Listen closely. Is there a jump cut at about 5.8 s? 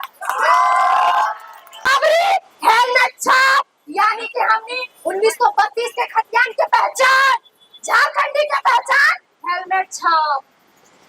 no; 1 cut; at 1.9 s

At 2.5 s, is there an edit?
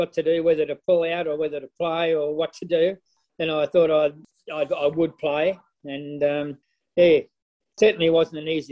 no; 0 cuts

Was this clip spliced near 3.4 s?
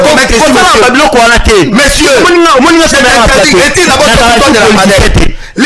no; 0 cuts

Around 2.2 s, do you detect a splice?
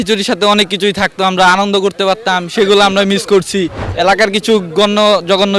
no; 1 cut; at 3.8 s

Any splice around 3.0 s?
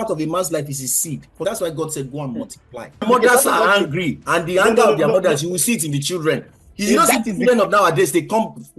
yes; 2 cuts; at 1.4 s, 3.0 s

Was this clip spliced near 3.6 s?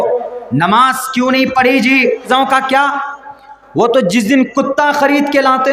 no; 1 cut; at 2.3 s

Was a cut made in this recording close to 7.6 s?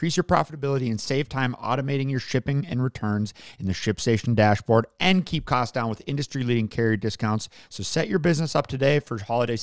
yes; 1 cut; at 7.6 s

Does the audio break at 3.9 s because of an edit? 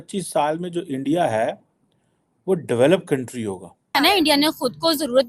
yes; 1 cut; at 3.9 s

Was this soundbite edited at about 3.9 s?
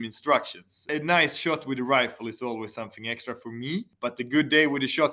yes; 2 cuts; at 0.9 s, 3.9 s

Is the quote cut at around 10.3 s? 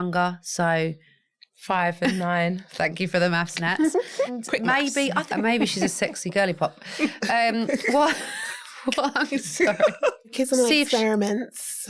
yes; 3 cuts; at 4.4 s, 5.3 s, 10.3 s

